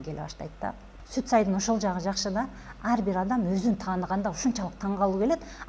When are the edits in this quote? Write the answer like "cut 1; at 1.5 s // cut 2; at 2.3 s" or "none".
cut 1; at 0.9 s